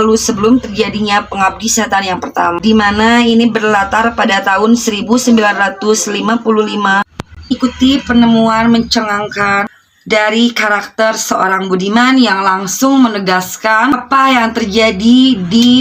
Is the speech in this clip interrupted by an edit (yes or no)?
no